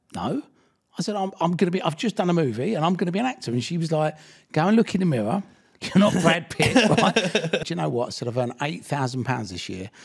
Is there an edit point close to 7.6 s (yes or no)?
yes